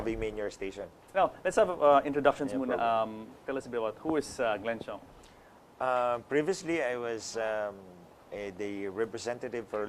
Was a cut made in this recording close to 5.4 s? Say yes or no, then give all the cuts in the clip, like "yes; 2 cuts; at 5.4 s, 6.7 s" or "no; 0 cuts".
yes; 1 cut; at 5.4 s